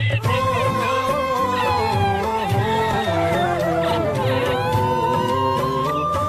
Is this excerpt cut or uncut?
uncut